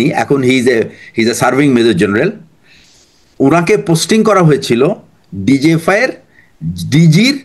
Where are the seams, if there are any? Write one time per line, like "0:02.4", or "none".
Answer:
none

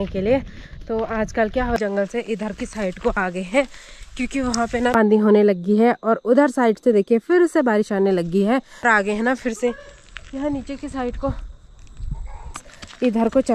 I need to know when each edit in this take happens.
0:01.8
0:04.9
0:08.8
0:12.6

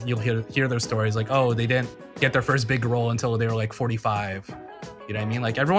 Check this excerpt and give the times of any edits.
none

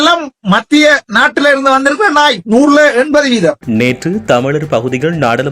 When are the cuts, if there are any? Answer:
0:01.1
0:02.4

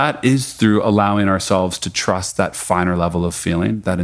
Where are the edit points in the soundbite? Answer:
none

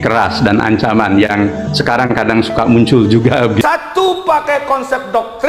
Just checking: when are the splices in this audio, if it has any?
0:03.6

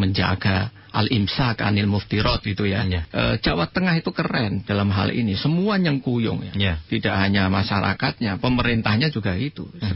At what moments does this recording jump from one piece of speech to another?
0:03.0

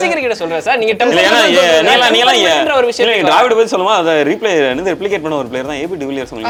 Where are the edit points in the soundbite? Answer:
none

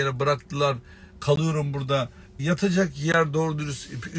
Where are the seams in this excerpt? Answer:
0:02.4

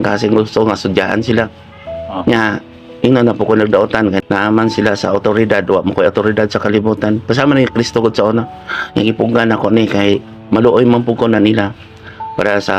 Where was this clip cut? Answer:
0:04.2

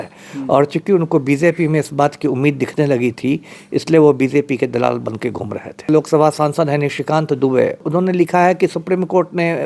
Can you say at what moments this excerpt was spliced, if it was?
0:05.9
0:07.9

